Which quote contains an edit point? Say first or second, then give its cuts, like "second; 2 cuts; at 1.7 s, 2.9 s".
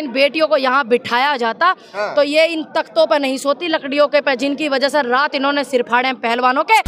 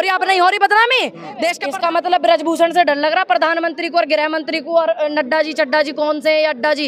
second; 1 cut; at 1.6 s